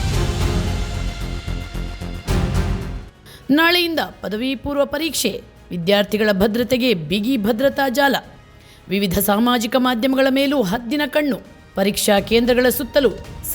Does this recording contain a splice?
yes; 1 cut; at 3.2 s

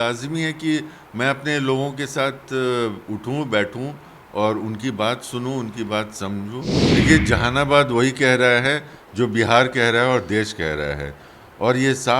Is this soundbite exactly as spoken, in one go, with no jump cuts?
no; 1 cut; at 6.8 s

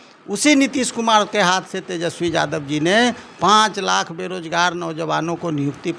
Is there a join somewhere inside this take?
no; 0 cuts

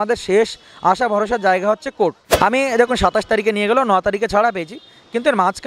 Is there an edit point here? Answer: yes; 1 cut; at 2.2 s

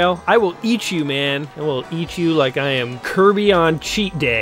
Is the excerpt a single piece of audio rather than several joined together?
no; 2 cuts; at 1.5 s, 3.0 s

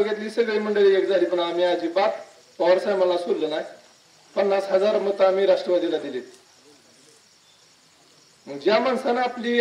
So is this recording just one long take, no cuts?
yes; 0 cuts

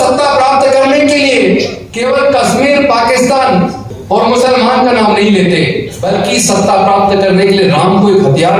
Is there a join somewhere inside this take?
yes; 3 cuts; at 1.8 s, 3.9 s, 5.9 s

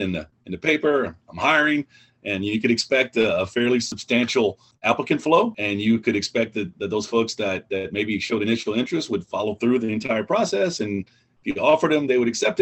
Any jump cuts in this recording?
yes; 2 cuts; at 4.5 s, 5.6 s

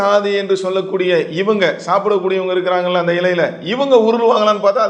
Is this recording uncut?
yes; 0 cuts

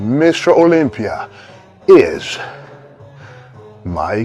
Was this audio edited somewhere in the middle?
no; 0 cuts

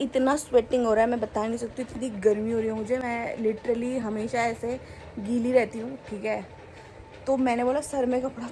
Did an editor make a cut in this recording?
no; 0 cuts

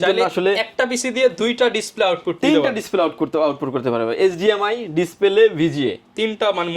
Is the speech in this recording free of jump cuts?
yes; 0 cuts

